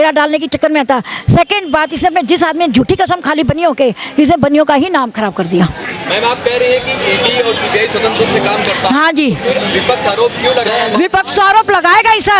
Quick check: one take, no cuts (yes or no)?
yes